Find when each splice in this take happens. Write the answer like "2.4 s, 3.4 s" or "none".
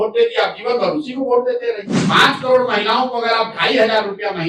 1.9 s